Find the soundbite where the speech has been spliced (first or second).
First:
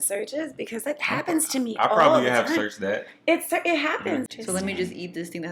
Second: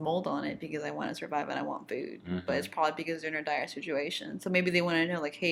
first